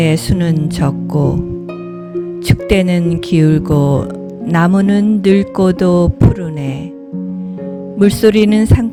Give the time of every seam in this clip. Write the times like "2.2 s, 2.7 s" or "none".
none